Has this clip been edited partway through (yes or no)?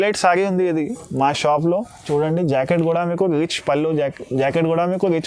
no